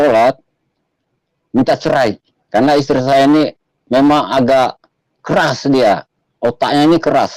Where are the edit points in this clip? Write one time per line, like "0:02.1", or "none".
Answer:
none